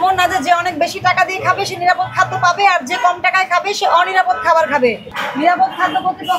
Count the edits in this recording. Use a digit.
1